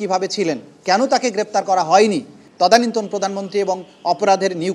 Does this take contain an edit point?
yes; 1 cut; at 2.4 s

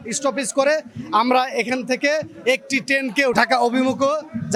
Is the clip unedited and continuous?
yes; 0 cuts

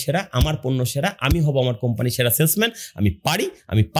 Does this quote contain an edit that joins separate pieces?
no; 0 cuts

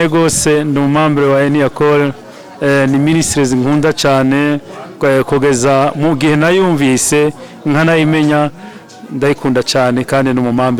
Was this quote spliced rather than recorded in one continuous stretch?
no; 0 cuts

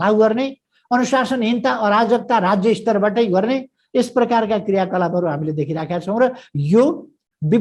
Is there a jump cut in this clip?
no; 0 cuts

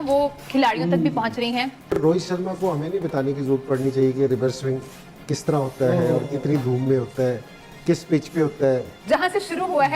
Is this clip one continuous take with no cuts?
no; 1 cut; at 1.8 s

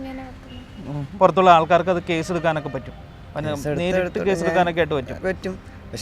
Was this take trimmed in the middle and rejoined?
yes; 1 cut; at 1.1 s

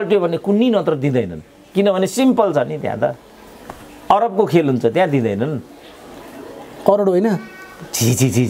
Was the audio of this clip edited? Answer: no; 0 cuts

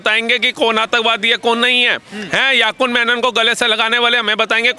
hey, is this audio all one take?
yes; 0 cuts

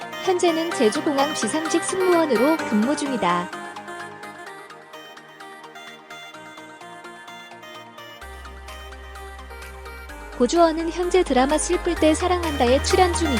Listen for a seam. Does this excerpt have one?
yes; 2 cuts; at 3.4 s, 10.3 s

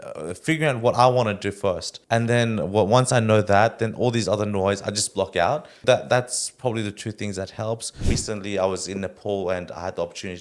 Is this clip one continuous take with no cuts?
no; 3 cuts; at 1.9 s, 5.8 s, 8.2 s

